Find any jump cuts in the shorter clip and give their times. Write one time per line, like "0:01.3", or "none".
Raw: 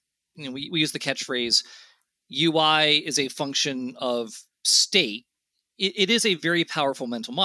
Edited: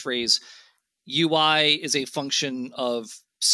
none